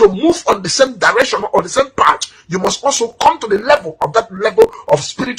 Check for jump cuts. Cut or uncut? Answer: uncut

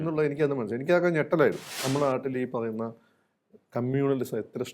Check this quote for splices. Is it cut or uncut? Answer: cut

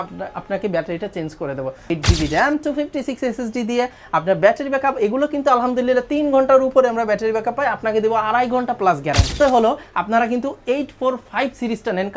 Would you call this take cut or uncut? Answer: cut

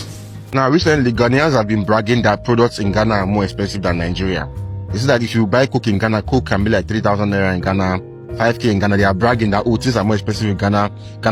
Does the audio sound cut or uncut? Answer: uncut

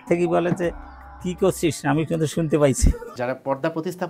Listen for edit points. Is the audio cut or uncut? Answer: cut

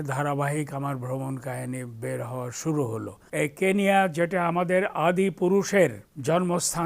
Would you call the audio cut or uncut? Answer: cut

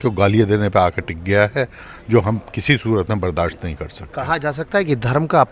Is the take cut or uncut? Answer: uncut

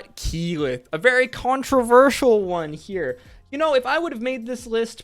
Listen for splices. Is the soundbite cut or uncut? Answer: uncut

